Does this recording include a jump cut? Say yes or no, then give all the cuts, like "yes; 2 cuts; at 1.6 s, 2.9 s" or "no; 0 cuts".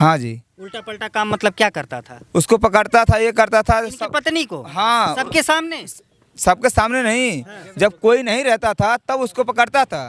no; 0 cuts